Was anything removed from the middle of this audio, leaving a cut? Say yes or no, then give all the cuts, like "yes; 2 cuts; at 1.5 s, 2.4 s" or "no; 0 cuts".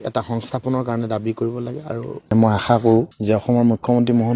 yes; 1 cut; at 2.3 s